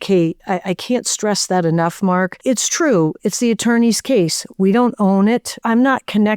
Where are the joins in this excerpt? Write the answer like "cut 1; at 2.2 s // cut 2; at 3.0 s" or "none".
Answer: cut 1; at 2.4 s // cut 2; at 5.5 s